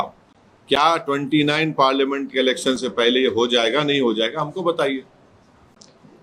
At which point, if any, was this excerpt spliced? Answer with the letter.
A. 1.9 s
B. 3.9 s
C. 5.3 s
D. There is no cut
D